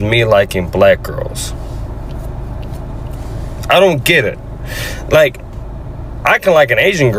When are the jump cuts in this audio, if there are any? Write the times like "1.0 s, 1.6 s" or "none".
none

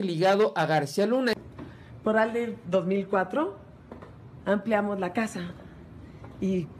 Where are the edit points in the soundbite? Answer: 1.4 s

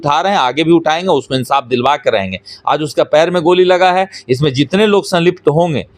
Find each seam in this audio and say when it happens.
none

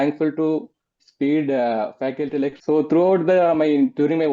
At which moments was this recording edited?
2.6 s

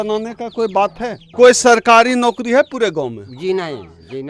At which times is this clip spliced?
1.2 s

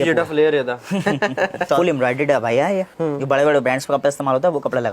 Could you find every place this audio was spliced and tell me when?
1.7 s, 2.9 s

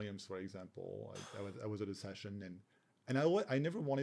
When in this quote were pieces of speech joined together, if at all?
none

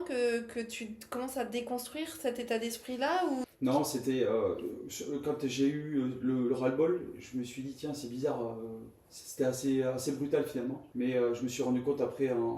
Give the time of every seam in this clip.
3.5 s, 10.8 s

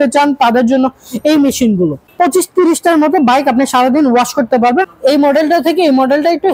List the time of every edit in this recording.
2.0 s, 4.9 s

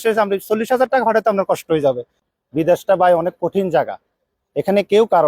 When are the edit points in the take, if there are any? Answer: 2.3 s

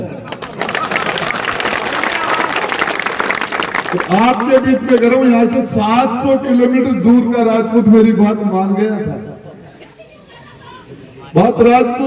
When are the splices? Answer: none

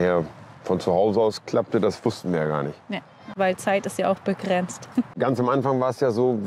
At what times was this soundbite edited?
3.3 s, 5.1 s

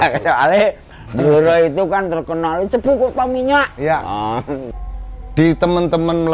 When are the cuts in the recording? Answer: 4.7 s

